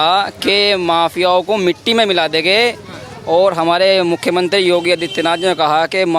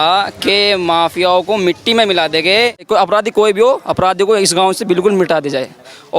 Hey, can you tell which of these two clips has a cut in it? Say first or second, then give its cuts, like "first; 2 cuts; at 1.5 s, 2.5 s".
second; 1 cut; at 2.9 s